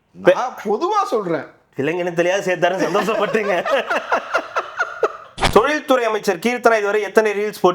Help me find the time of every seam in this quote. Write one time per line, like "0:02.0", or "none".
0:05.3